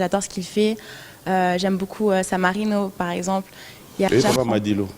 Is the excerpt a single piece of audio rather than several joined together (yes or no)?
no